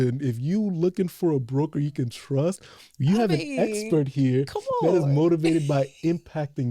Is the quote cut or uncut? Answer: uncut